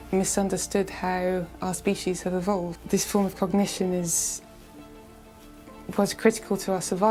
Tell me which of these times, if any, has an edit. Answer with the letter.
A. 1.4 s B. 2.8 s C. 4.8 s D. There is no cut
B